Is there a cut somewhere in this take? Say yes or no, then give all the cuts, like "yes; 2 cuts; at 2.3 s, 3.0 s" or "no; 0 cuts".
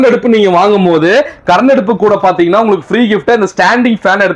no; 0 cuts